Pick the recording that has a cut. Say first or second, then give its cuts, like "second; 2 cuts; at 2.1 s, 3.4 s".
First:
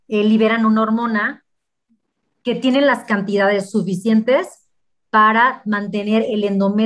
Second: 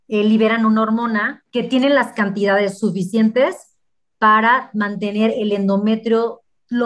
second; 1 cut; at 1.4 s